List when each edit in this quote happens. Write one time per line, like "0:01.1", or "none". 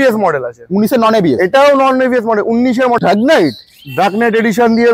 0:03.0